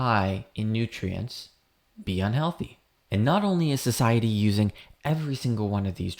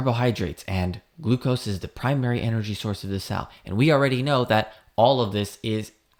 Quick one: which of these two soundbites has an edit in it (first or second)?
first